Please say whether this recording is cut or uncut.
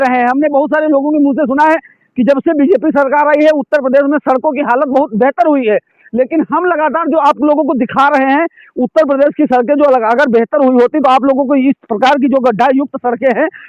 uncut